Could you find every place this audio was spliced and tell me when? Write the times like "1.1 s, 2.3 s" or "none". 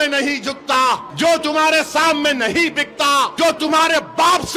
1.1 s, 3.3 s